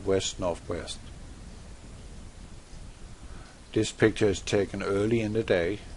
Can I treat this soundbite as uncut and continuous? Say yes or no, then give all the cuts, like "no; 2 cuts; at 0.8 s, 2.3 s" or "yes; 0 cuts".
no; 1 cut; at 4.4 s